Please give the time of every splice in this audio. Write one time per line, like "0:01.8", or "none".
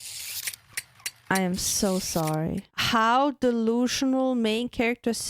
0:02.7